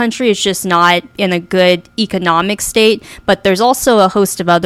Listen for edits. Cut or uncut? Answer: uncut